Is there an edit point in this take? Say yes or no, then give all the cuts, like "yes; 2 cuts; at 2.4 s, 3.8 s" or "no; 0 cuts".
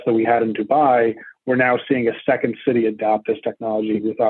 no; 0 cuts